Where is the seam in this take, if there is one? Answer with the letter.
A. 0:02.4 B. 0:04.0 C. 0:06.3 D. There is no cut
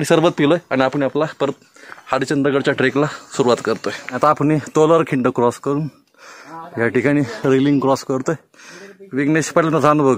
B